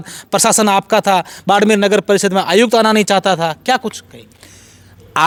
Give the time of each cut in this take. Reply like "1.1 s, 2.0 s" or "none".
none

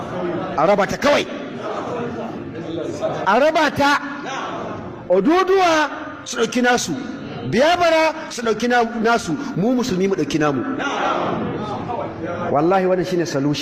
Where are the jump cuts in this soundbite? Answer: 1.3 s

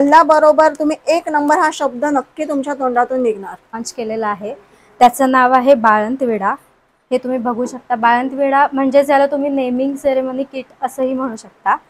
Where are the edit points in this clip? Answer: 3.9 s

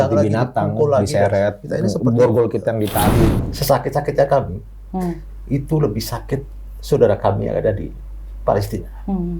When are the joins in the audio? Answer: 3.5 s

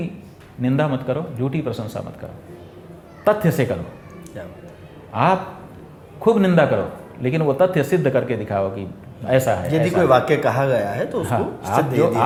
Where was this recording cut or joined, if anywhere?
none

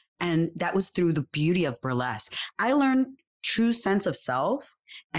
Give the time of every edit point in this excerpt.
2.4 s

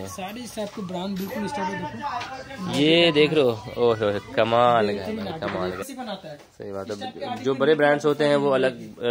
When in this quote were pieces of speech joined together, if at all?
5.9 s

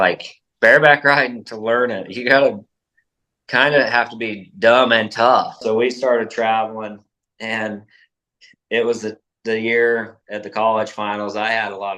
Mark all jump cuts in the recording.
5.6 s

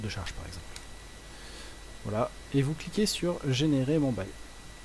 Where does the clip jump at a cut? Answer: none

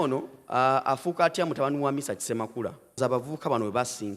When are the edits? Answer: 3.0 s

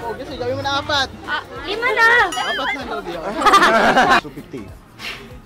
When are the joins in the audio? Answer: 4.2 s

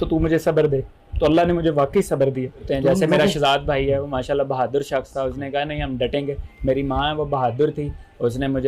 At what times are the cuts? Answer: 2.7 s

